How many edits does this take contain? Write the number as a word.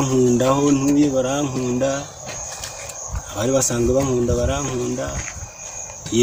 zero